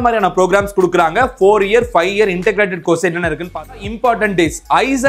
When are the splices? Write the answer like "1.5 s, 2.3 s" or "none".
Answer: 3.8 s